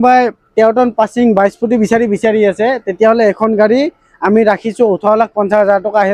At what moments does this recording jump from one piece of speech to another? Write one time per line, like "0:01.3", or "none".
none